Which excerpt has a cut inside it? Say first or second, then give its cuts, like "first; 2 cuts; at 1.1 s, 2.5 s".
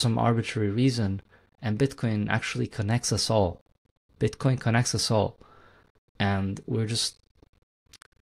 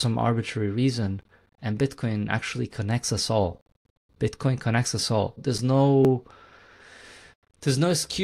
second; 1 cut; at 5.4 s